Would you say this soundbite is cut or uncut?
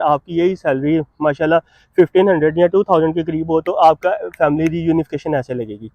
uncut